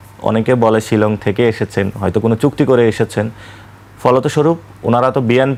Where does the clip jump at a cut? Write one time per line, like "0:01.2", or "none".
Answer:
none